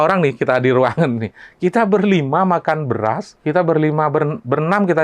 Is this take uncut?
no; 1 cut; at 3.3 s

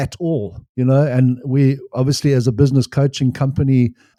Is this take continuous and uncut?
yes; 0 cuts

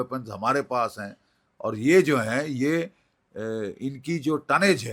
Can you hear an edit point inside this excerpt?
no; 0 cuts

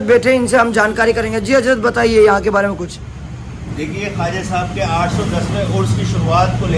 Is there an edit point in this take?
no; 0 cuts

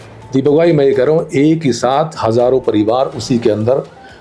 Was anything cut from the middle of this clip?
no; 0 cuts

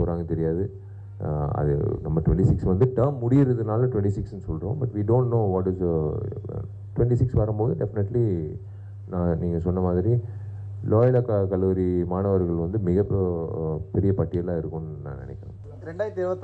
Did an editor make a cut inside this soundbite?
no; 0 cuts

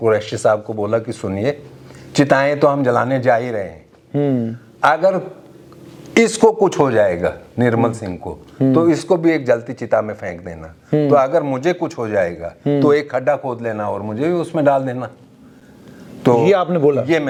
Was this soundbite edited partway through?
no; 0 cuts

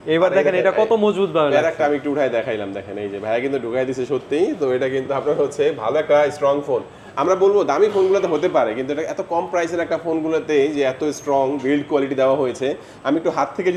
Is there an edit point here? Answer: no; 0 cuts

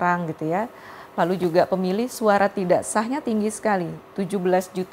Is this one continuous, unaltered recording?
yes; 0 cuts

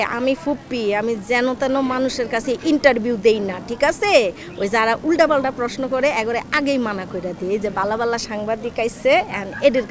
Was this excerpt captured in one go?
yes; 0 cuts

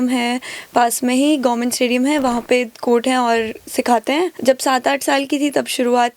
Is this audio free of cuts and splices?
no; 1 cut; at 4.4 s

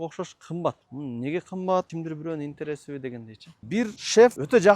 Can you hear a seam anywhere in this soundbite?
yes; 3 cuts; at 0.9 s, 1.9 s, 3.6 s

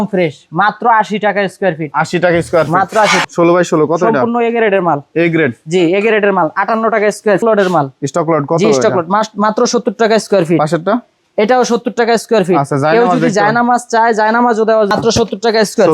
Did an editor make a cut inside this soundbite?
yes; 3 cuts; at 3.2 s, 7.4 s, 14.9 s

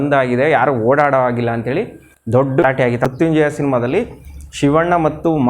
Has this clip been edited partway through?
yes; 1 cut; at 2.7 s

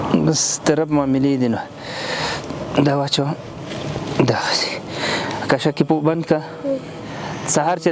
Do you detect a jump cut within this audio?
no; 0 cuts

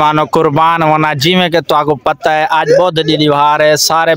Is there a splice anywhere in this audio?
no; 0 cuts

